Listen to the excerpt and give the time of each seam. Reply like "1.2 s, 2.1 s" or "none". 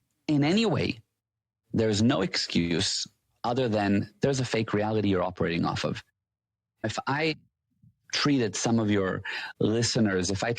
6.9 s